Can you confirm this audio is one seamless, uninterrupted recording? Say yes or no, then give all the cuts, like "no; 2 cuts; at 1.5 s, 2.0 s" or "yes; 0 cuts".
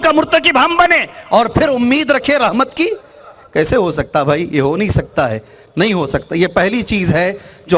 yes; 0 cuts